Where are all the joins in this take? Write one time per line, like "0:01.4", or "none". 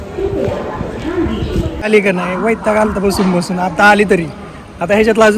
0:01.9